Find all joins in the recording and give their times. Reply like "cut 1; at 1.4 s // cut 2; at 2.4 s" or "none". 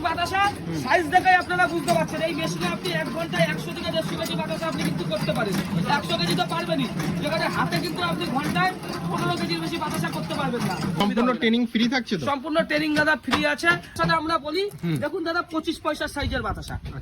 cut 1; at 11.0 s // cut 2; at 13.9 s